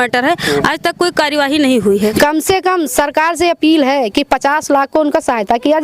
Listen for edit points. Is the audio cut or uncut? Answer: cut